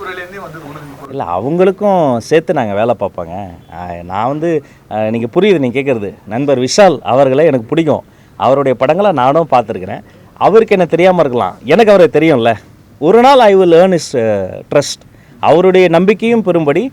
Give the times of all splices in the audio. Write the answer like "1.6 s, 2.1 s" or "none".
none